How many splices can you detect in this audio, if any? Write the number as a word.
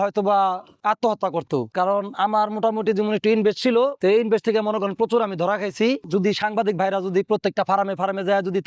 two